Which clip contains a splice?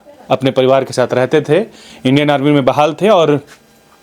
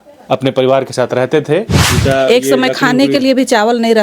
second; 1 cut; at 1.8 s

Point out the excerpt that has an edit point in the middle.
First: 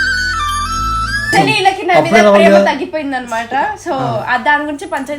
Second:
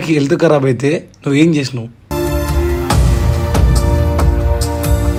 first; 1 cut; at 1.3 s

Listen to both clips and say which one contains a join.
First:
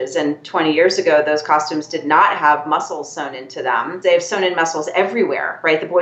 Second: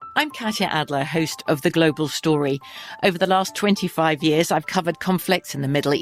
first; 1 cut; at 3.9 s

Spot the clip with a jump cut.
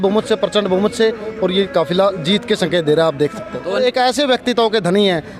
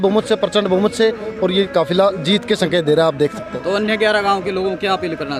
first; 1 cut; at 3.8 s

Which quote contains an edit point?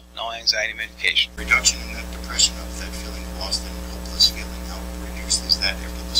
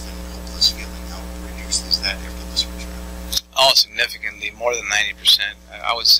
first; 1 cut; at 1.3 s

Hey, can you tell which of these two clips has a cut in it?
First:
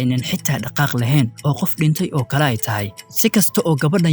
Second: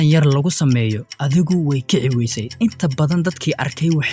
second; 2 cuts; at 1.1 s, 2.4 s

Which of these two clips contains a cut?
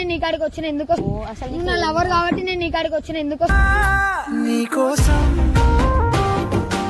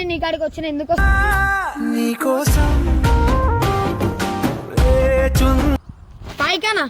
second; 2 cuts; at 1.0 s, 5.8 s

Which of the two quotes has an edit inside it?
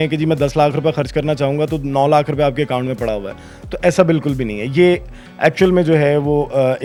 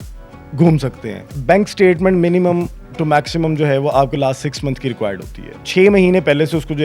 second; 2 cuts; at 1.3 s, 5.6 s

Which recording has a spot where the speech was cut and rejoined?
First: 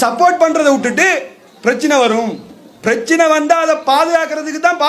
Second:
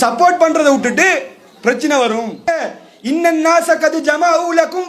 second; 1 cut; at 2.5 s

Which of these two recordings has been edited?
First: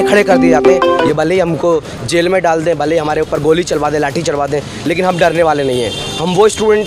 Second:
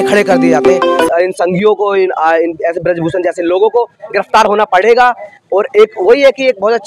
first; 1 cut; at 1.1 s

